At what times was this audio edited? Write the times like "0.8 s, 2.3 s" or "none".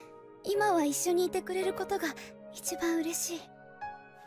1.2 s